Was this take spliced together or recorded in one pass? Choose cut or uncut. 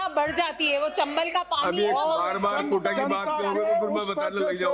uncut